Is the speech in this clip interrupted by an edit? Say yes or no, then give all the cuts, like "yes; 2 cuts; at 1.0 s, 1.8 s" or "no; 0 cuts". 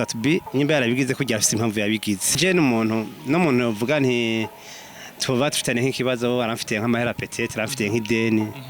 yes; 1 cut; at 2.4 s